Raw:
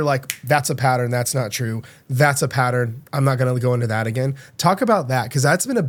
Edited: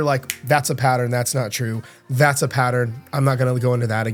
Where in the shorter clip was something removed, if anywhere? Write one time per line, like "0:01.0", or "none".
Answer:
none